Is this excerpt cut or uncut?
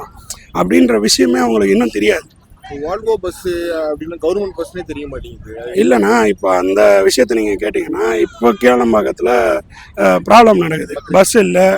uncut